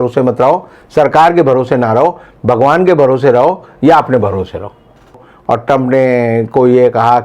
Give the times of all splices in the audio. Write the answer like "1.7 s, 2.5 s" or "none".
5.3 s

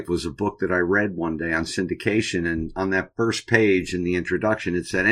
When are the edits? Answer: none

